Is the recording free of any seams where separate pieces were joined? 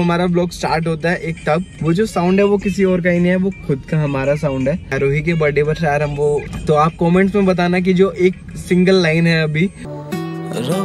no; 4 cuts; at 1.7 s, 4.9 s, 6.5 s, 9.9 s

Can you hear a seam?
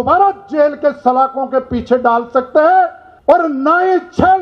yes; 1 cut; at 3.1 s

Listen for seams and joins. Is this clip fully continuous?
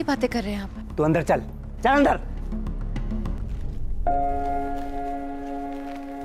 no; 1 cut; at 3.4 s

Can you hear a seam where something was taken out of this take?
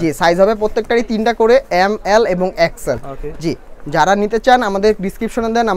no; 0 cuts

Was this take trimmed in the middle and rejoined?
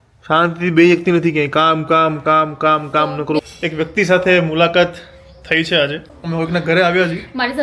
yes; 2 cuts; at 3.4 s, 6.1 s

